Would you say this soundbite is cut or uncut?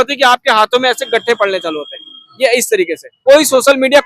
cut